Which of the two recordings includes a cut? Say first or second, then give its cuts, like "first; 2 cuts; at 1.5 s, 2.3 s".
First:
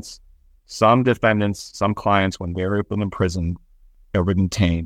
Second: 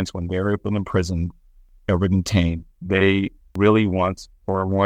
second; 1 cut; at 3.5 s